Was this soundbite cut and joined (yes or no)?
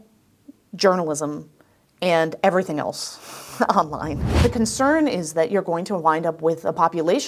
yes